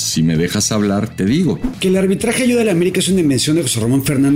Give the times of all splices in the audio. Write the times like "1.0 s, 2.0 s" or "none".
1.7 s